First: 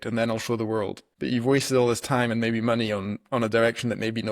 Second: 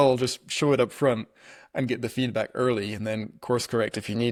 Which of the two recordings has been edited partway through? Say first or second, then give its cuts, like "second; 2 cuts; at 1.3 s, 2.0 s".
first; 1 cut; at 1.0 s